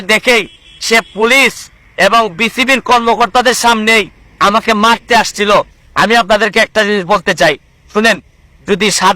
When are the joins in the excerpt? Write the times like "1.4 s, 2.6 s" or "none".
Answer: 5.8 s